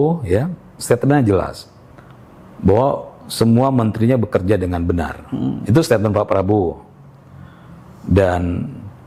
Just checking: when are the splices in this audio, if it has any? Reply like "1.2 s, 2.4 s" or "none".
none